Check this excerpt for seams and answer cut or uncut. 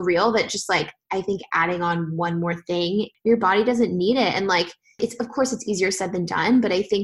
cut